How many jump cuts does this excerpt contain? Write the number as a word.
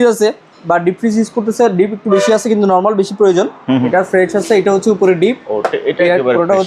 one